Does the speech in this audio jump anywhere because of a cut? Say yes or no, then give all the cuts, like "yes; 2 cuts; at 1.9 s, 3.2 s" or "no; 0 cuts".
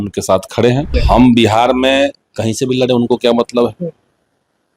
yes; 1 cut; at 1.0 s